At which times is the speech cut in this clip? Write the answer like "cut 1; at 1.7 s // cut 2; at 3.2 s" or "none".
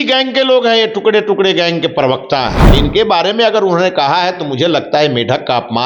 cut 1; at 2.6 s